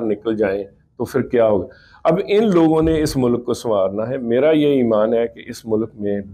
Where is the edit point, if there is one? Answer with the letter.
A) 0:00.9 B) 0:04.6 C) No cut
C